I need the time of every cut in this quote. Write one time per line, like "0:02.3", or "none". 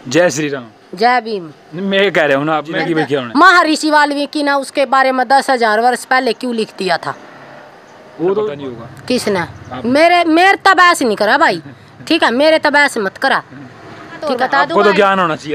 0:03.0
0:08.7
0:14.3